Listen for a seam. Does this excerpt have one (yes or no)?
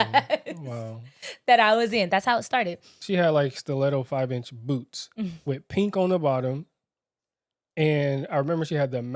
yes